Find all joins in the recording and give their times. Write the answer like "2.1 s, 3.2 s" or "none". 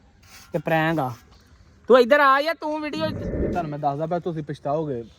3.2 s